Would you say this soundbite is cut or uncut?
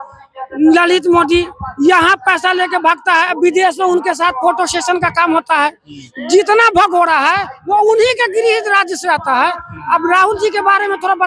uncut